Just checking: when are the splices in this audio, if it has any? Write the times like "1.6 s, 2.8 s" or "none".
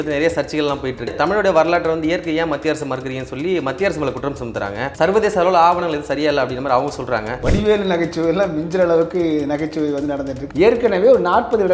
1.1 s, 4.8 s, 7.3 s, 10.4 s